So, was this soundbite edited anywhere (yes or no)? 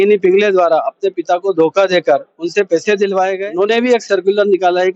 yes